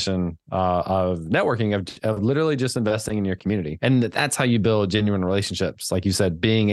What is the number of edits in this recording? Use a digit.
1